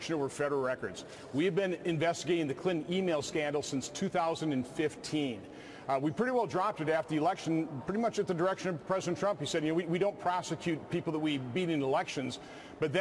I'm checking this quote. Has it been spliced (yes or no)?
yes